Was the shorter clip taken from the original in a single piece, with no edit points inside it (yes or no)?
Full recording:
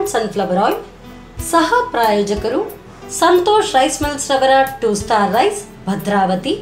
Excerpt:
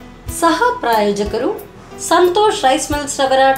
yes